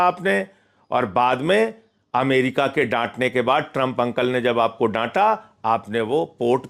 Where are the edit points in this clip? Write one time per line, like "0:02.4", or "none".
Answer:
none